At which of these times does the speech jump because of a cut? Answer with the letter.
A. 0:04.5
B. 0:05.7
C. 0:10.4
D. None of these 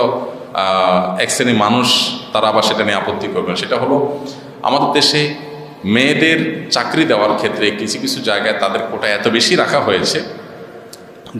D